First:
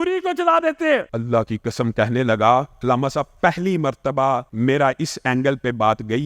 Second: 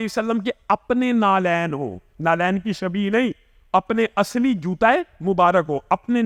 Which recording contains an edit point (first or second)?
first